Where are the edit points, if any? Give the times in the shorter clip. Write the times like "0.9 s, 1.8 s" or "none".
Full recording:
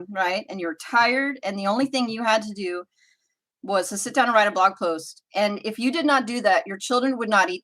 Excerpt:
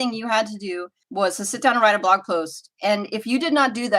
1.0 s